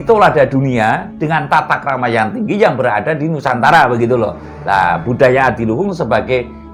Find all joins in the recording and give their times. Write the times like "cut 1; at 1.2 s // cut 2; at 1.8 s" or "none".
none